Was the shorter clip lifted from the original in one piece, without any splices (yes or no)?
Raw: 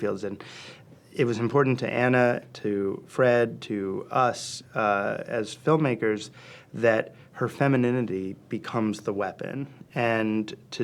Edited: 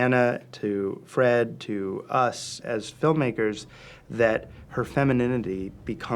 no